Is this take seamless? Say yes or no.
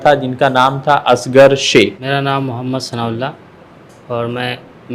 no